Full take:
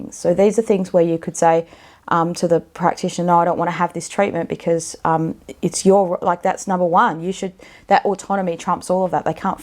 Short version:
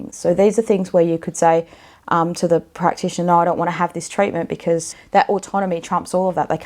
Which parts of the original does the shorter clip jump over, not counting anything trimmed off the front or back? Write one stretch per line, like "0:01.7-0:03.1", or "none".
0:04.9-0:07.7